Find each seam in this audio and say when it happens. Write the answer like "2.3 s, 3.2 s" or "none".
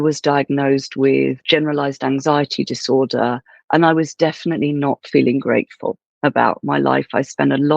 1.4 s